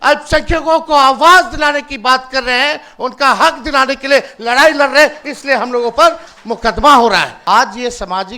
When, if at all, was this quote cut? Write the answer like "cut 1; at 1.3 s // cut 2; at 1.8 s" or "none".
cut 1; at 7.3 s